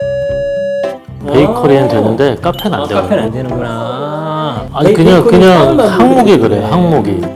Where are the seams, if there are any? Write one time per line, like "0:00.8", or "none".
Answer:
0:04.6